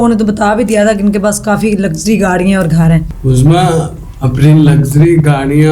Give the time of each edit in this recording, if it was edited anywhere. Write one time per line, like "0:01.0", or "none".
0:03.1